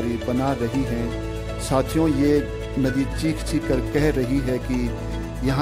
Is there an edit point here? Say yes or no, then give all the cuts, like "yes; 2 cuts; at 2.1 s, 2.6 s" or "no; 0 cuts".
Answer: no; 0 cuts